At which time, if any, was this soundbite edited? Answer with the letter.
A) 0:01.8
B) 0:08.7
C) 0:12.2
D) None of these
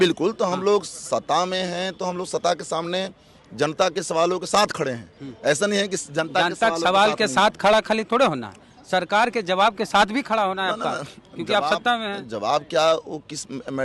D